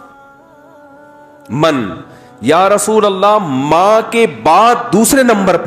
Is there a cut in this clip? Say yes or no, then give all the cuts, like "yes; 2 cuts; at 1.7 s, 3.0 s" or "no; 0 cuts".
no; 0 cuts